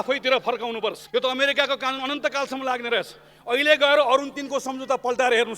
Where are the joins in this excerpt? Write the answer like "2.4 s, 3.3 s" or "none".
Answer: 1.0 s